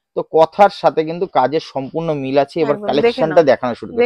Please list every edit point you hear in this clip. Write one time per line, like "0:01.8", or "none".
none